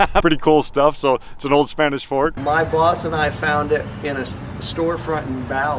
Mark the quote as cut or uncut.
cut